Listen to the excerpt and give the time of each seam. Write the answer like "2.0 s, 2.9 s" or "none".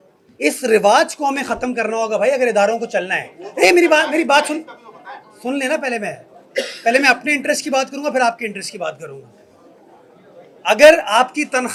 none

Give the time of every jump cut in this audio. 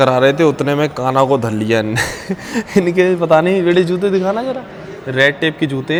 none

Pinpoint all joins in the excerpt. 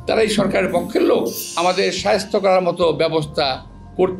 1.4 s

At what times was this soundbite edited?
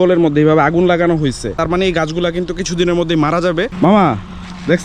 1.6 s, 3.7 s

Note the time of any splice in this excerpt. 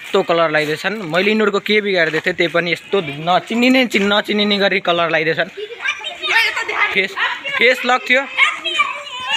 none

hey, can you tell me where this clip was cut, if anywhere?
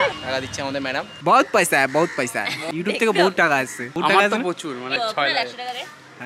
2.6 s

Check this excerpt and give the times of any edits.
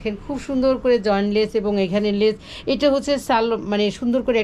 none

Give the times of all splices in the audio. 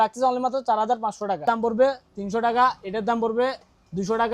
1.4 s

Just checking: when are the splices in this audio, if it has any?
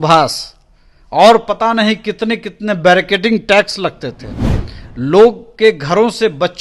none

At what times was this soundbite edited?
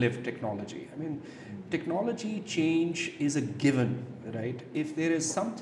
none

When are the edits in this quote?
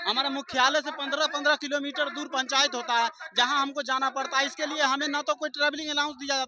none

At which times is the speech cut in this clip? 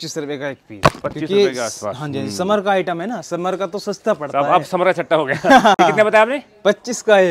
none

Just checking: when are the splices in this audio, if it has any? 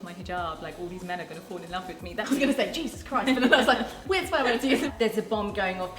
2.3 s, 4.9 s

